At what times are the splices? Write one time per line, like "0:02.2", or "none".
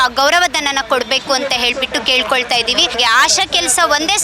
0:02.9

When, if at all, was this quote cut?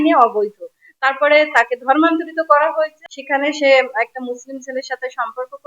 0:03.1

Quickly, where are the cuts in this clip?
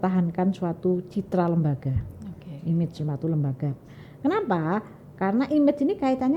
none

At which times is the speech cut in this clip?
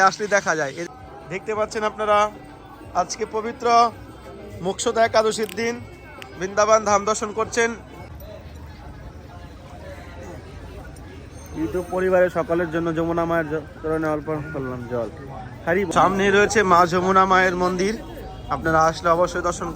0:00.9
0:08.1
0:15.9

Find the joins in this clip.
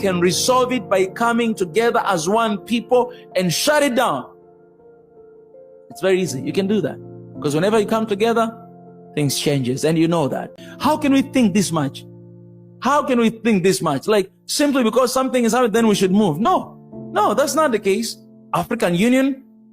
0:10.6

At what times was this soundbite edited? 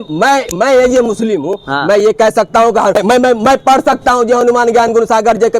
0:03.0

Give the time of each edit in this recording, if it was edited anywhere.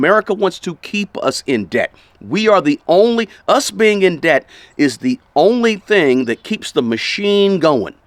none

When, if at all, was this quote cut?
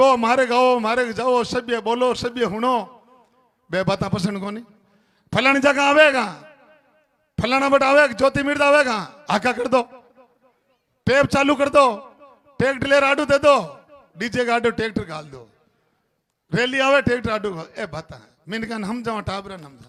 none

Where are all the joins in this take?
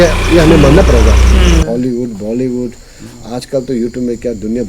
0:01.6

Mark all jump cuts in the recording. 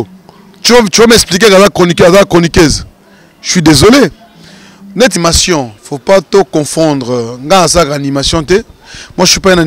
0:05.1

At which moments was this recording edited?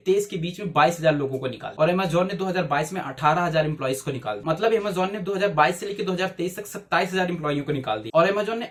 none

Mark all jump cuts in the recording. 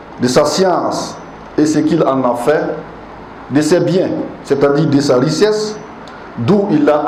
none

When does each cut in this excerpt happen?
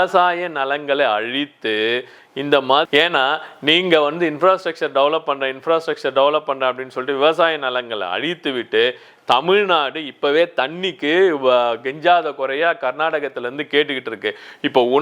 0:02.9

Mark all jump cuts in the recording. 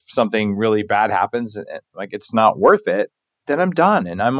none

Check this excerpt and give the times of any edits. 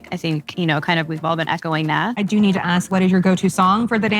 0:02.1
0:02.9

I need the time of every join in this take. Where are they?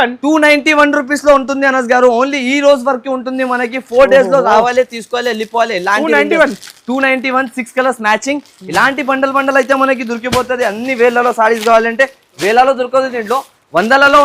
none

